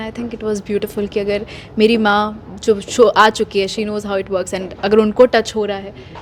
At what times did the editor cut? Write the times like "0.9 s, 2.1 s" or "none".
none

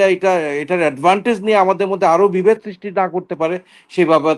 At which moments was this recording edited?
none

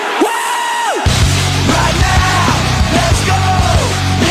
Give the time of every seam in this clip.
1.0 s

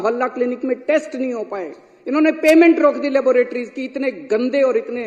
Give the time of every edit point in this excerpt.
none

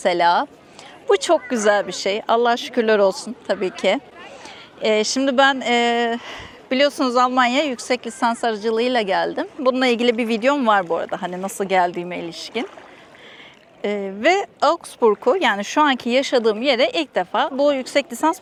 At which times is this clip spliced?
none

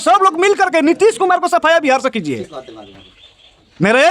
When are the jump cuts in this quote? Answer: none

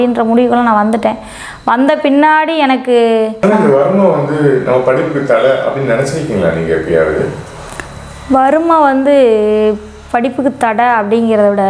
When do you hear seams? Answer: 3.3 s

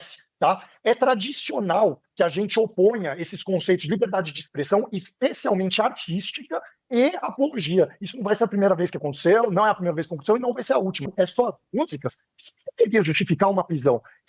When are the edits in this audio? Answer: 11.0 s

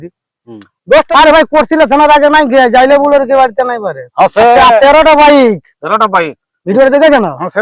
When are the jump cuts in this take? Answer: 1.1 s

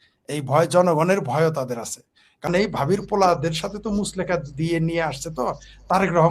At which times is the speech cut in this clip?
2.5 s

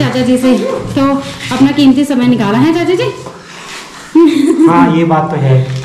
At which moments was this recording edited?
none

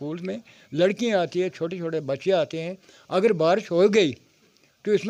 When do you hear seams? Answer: none

